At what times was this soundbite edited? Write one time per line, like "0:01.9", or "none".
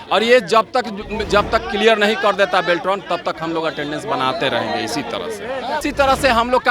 0:05.8